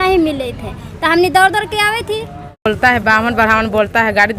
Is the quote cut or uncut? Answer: cut